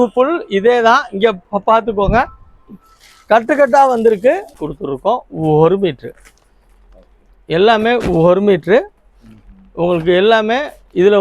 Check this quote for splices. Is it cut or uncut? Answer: cut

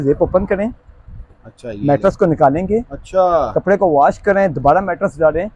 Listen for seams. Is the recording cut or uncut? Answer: uncut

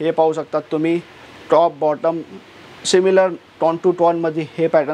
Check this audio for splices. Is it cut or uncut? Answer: uncut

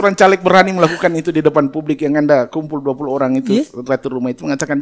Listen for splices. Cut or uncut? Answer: uncut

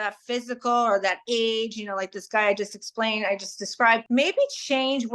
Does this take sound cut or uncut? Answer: cut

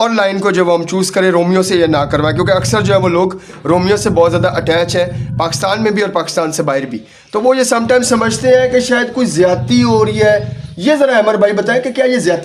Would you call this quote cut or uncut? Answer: uncut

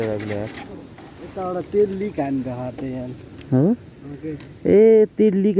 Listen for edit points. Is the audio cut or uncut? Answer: uncut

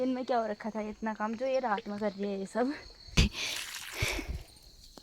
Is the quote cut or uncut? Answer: cut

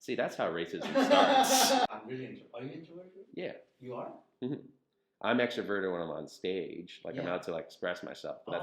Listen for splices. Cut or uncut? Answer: cut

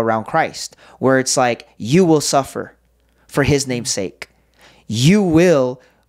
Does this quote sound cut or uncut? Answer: uncut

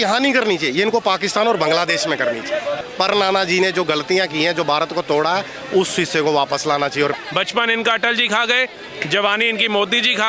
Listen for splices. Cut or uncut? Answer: cut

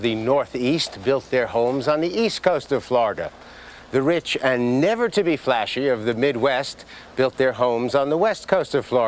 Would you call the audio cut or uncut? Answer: uncut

